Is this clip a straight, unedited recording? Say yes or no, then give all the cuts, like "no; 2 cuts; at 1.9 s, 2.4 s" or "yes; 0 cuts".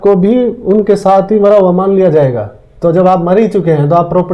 yes; 0 cuts